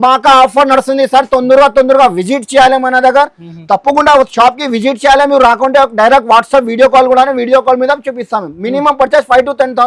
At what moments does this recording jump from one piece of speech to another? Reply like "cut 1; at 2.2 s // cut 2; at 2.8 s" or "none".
none